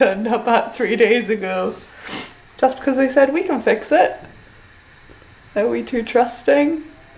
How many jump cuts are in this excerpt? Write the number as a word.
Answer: zero